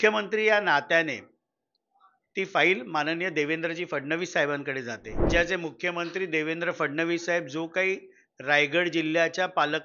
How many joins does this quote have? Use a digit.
1